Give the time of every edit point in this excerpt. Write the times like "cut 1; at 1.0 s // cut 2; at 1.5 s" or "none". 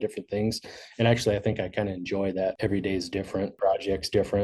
cut 1; at 2.6 s // cut 2; at 3.5 s